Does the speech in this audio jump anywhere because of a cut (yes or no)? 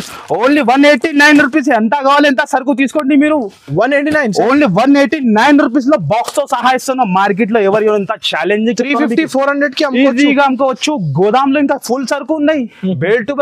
no